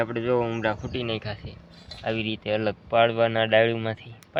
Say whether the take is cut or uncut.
uncut